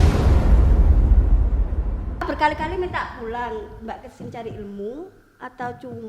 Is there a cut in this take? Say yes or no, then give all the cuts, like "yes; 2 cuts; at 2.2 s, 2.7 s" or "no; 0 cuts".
yes; 1 cut; at 2.2 s